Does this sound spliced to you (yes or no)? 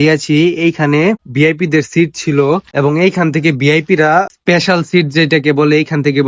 yes